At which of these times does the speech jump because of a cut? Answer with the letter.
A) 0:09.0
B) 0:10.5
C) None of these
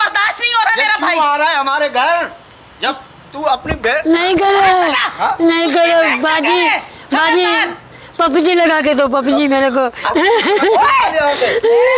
C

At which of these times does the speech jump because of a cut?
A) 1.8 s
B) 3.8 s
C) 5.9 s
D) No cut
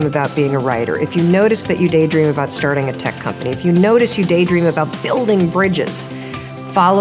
D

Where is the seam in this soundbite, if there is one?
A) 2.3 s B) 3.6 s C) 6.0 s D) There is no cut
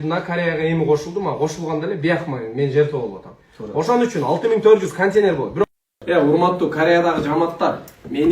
C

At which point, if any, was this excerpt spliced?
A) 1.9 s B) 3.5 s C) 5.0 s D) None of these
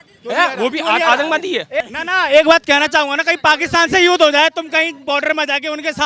A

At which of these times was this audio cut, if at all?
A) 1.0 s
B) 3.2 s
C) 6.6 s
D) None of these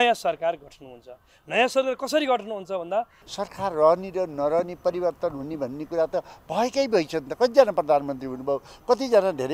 B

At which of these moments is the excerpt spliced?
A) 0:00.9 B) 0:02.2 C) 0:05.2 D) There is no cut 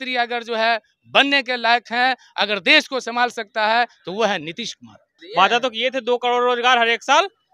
C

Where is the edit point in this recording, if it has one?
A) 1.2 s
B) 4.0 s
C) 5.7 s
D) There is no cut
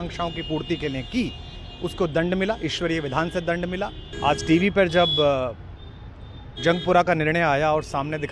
B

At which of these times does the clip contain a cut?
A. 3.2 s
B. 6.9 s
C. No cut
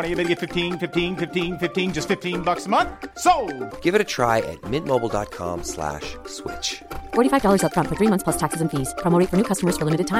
C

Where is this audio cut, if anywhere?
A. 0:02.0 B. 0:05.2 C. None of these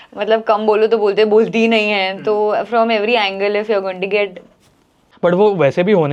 C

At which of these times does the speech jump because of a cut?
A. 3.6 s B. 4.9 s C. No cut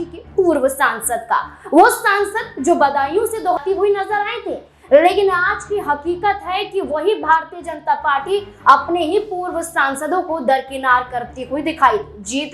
A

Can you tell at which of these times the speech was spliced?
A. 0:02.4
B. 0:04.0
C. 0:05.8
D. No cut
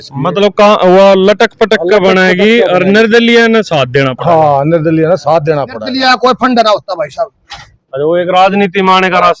C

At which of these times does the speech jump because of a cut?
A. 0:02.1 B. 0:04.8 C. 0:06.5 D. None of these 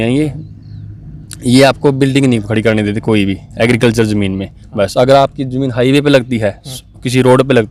D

